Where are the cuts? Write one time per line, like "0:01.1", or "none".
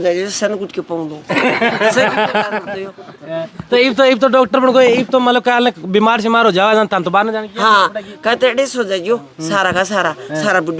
none